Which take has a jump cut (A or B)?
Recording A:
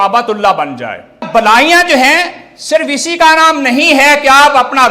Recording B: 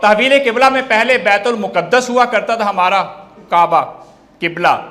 A